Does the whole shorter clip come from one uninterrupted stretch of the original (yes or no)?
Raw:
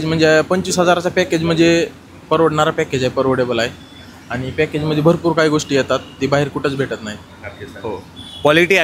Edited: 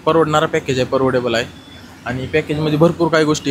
yes